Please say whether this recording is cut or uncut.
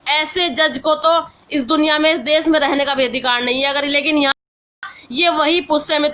cut